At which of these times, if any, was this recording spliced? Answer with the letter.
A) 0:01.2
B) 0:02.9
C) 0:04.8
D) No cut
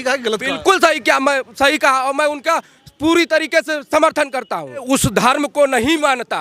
C